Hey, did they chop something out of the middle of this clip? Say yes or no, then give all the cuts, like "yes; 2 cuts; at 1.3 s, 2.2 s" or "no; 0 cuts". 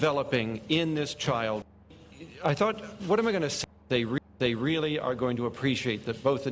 no; 0 cuts